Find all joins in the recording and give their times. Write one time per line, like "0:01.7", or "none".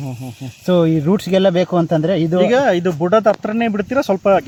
none